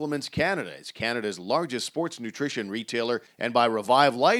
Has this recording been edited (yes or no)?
yes